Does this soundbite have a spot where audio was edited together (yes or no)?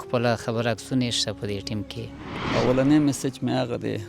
yes